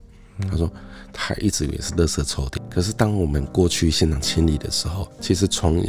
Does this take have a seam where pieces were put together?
yes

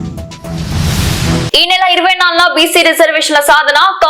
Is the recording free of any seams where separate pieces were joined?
yes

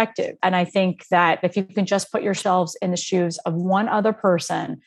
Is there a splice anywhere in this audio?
yes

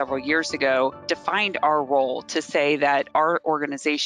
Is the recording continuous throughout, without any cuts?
no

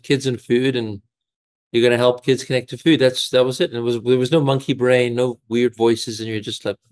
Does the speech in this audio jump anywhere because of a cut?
no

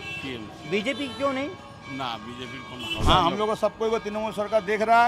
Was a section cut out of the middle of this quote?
yes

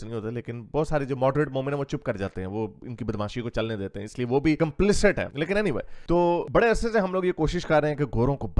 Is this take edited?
no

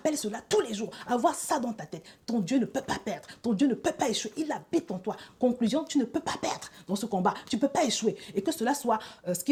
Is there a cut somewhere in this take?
no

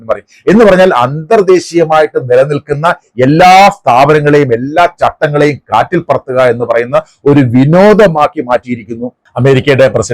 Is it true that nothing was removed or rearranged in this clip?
yes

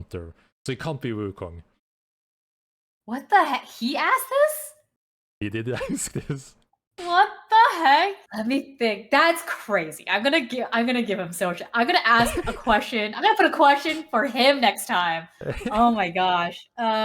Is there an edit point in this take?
yes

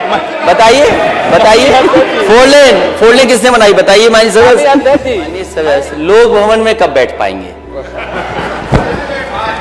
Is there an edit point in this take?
yes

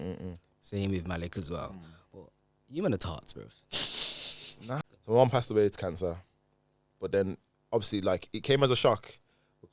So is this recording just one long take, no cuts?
no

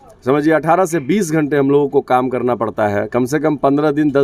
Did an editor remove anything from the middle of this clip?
no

